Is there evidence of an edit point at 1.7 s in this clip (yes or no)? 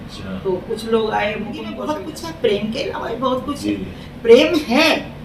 yes